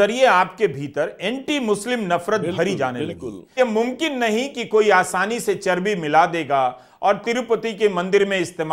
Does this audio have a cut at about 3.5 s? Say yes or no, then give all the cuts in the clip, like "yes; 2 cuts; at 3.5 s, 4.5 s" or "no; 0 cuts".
yes; 1 cut; at 3.5 s